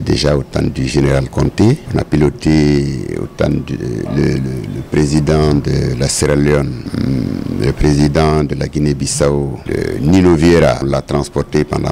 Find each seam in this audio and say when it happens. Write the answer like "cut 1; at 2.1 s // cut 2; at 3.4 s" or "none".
cut 1; at 1.8 s // cut 2; at 6.8 s // cut 3; at 9.6 s // cut 4; at 10.8 s